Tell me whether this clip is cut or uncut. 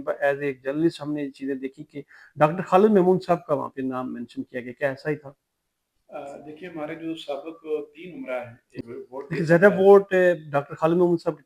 cut